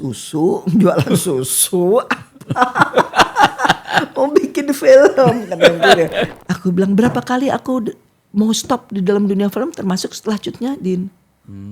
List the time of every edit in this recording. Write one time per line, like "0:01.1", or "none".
0:06.3